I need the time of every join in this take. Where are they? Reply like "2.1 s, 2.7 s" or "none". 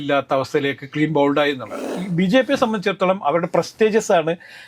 1.9 s